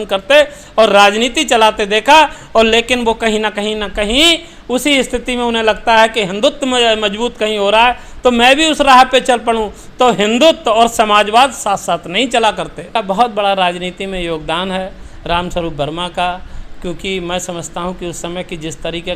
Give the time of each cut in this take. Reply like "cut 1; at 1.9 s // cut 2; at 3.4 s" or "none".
cut 1; at 12.9 s